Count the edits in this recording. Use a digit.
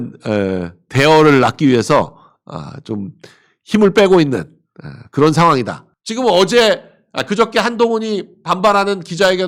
1